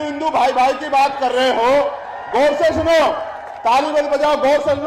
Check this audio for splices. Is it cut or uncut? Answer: uncut